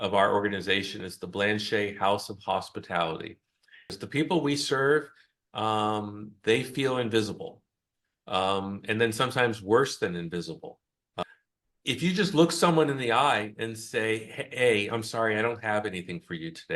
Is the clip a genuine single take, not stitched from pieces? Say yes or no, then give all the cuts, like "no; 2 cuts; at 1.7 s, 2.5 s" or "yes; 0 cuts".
no; 2 cuts; at 3.9 s, 11.2 s